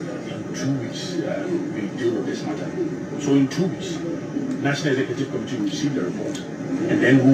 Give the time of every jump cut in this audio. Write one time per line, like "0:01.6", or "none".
none

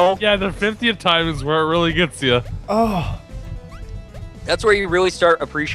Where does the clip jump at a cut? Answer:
none

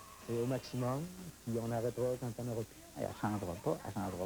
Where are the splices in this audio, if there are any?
0:03.0

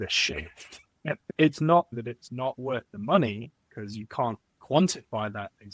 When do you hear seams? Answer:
0:01.3
0:01.9

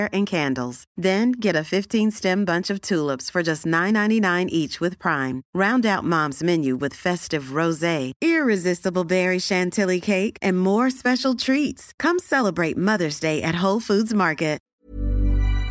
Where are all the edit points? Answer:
0:14.7

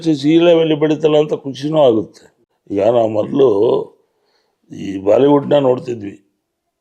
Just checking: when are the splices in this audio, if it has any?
none

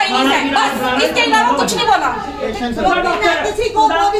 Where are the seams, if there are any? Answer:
0:02.5

